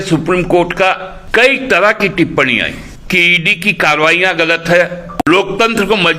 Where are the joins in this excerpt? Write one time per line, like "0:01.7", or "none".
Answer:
0:01.1
0:02.9
0:05.2